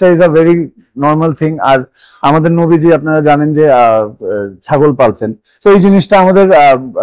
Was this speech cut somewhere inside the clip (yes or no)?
no